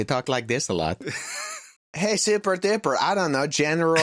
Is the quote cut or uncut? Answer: cut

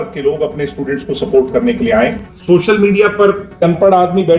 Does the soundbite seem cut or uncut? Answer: cut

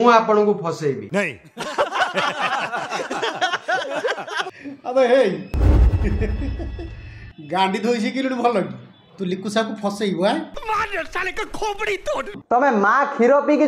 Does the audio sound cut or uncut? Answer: cut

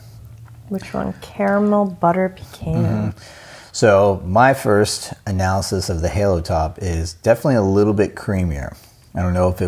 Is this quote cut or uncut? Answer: uncut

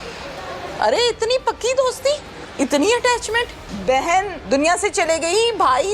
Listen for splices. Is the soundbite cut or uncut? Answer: cut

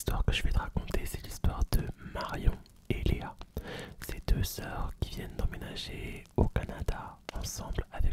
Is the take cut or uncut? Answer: uncut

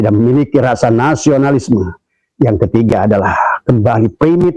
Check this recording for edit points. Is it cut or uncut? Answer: uncut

